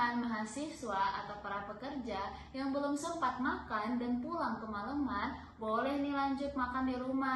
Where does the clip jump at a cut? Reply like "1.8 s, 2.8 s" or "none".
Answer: none